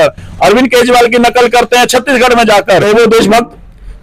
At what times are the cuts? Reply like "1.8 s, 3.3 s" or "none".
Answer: 2.8 s